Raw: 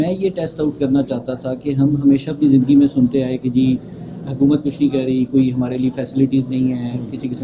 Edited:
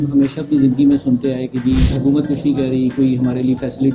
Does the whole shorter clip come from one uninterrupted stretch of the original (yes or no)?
no